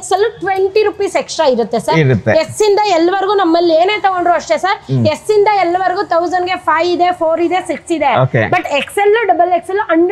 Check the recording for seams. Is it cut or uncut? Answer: uncut